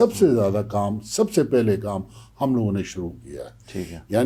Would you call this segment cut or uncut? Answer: uncut